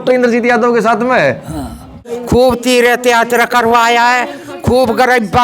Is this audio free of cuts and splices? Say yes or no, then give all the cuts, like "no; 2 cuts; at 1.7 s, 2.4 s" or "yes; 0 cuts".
no; 1 cut; at 1.9 s